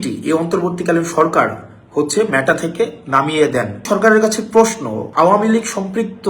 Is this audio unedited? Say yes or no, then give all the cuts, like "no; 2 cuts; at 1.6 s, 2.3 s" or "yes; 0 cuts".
no; 2 cuts; at 3.8 s, 5.0 s